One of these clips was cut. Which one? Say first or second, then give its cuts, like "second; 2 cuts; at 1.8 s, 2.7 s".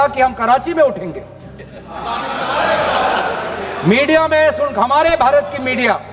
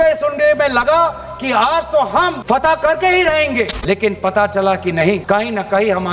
second; 3 cuts; at 2.4 s, 3.8 s, 5.2 s